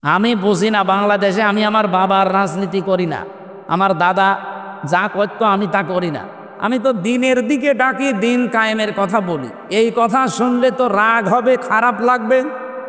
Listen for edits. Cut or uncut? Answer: uncut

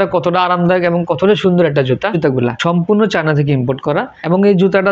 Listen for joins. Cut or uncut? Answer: cut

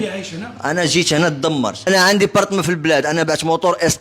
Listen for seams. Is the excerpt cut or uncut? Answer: cut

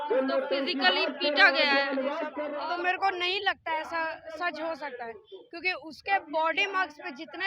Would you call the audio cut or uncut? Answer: cut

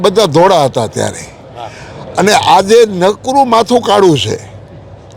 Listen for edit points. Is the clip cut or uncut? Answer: uncut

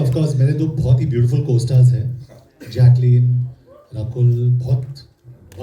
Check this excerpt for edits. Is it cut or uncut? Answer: uncut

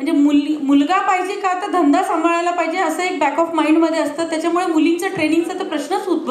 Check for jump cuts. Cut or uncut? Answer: uncut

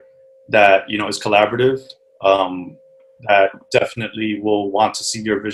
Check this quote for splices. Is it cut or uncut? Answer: uncut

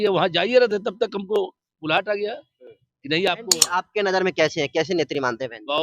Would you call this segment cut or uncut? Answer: cut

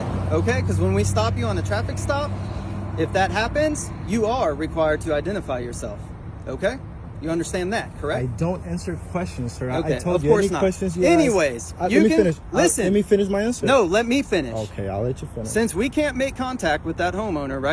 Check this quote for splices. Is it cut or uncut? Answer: uncut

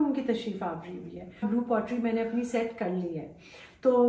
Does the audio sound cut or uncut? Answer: cut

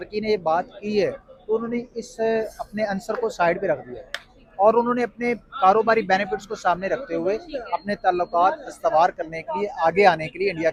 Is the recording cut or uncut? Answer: uncut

